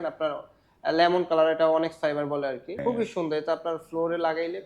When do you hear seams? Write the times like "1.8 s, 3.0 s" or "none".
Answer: 2.8 s